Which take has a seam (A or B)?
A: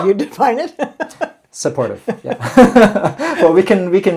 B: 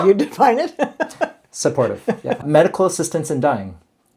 B